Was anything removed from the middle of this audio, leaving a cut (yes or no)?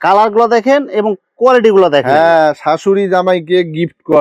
no